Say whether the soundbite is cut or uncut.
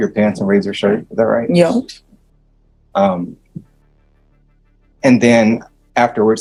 uncut